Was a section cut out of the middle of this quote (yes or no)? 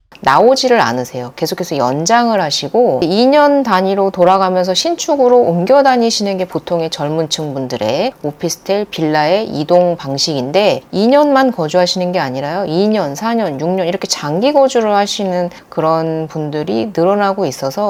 no